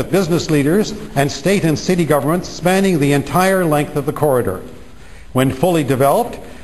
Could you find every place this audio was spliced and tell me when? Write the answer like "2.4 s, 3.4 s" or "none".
5.0 s